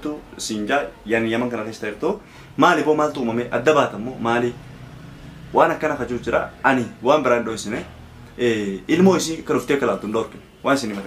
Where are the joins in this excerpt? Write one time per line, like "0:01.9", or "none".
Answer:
0:02.4